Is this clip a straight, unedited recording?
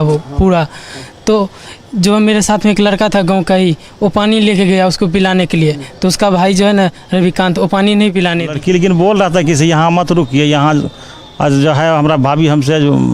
no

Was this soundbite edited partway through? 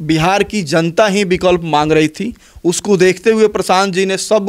no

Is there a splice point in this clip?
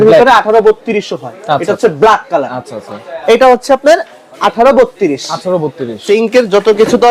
yes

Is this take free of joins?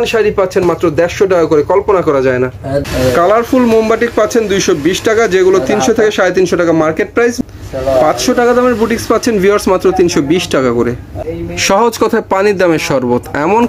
no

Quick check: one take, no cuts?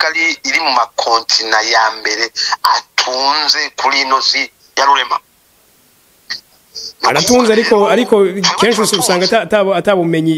yes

